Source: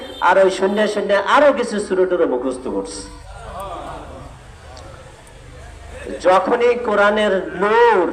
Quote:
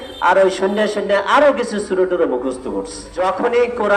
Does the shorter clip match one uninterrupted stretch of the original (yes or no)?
no